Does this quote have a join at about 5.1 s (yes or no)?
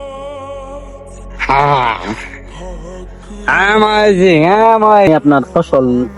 yes